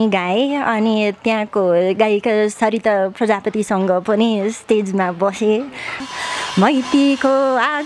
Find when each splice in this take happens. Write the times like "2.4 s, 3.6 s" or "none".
5.9 s